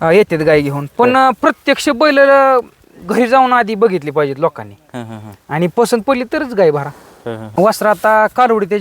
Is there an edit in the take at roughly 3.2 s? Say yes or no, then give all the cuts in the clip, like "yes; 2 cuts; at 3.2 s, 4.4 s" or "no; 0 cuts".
no; 1 cut; at 7.7 s